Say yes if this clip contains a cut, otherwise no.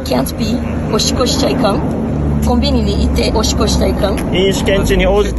no